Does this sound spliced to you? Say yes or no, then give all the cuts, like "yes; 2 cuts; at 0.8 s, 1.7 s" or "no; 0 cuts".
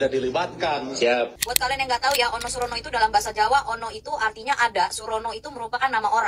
yes; 1 cut; at 1.4 s